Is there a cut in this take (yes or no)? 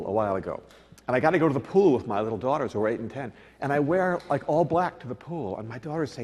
yes